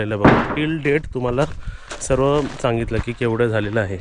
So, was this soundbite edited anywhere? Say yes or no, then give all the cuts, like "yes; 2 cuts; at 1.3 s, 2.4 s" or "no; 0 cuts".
no; 0 cuts